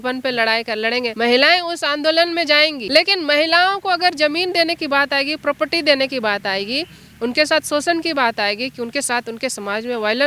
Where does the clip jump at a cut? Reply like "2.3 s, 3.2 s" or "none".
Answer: 1.1 s, 2.8 s